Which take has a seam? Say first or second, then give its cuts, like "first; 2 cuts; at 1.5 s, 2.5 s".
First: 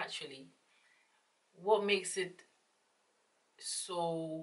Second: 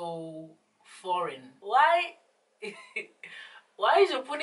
second; 1 cut; at 1.5 s